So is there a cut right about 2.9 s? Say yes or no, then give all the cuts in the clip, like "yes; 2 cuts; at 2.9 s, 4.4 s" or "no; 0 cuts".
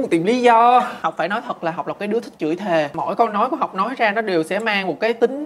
yes; 2 cuts; at 1.0 s, 2.9 s